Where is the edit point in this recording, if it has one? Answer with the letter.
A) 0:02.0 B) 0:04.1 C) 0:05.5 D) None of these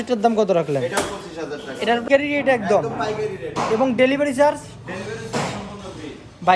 A